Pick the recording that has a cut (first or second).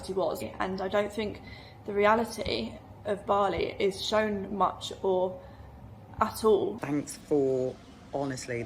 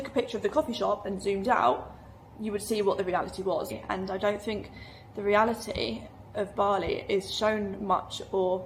first